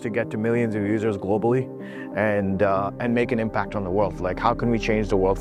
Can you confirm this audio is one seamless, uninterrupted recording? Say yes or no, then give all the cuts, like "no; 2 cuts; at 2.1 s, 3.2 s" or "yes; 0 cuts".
yes; 0 cuts